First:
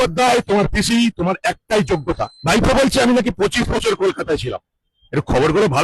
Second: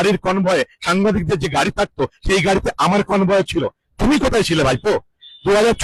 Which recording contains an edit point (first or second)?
first